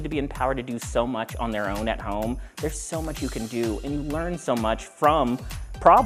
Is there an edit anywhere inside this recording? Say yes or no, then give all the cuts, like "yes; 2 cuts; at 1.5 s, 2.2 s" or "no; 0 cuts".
no; 0 cuts